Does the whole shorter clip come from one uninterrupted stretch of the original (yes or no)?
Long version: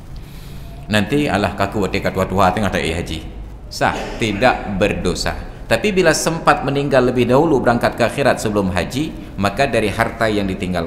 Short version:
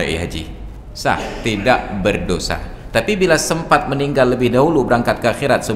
yes